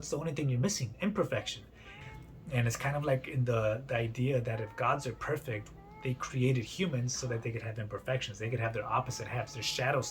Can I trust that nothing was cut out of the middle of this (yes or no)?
no